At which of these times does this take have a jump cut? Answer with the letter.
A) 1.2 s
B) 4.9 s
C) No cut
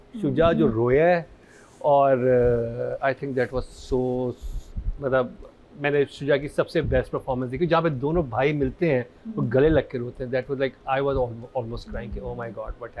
C